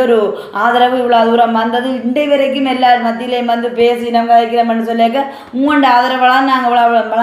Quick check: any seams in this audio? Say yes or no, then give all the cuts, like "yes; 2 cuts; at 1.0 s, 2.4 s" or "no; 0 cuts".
no; 0 cuts